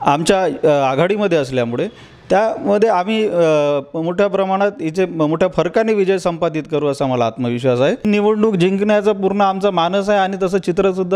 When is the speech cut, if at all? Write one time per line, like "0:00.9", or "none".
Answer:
0:08.0

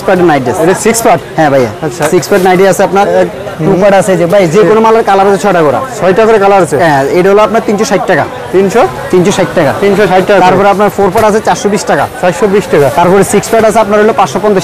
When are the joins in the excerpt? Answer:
none

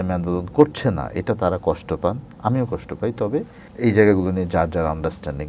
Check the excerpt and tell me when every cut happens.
0:03.6

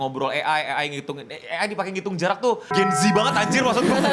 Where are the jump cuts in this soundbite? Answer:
0:02.7

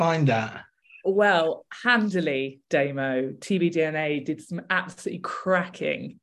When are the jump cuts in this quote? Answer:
none

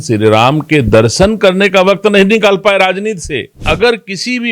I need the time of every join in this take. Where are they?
0:03.6

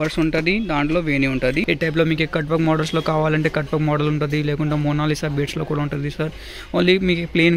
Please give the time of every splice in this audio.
0:01.6

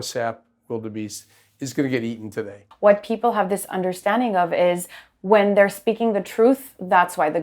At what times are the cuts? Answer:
0:02.6

